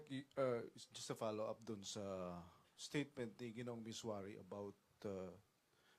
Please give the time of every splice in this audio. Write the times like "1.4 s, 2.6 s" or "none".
1.6 s